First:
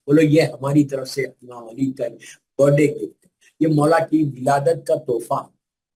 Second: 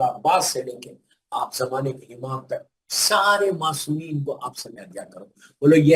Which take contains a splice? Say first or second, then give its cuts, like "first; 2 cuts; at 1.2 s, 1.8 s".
second; 1 cut; at 4.6 s